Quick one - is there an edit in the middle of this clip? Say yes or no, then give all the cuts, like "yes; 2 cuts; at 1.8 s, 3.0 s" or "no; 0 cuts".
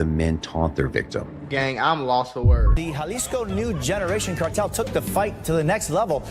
yes; 1 cut; at 2.8 s